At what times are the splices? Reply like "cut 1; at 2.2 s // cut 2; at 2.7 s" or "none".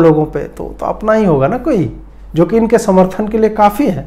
none

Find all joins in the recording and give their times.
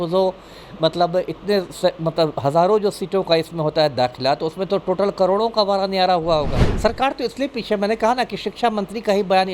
cut 1; at 6.6 s

